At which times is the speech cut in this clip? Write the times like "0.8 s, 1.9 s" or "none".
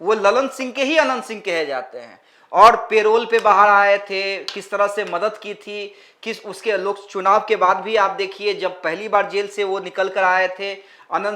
none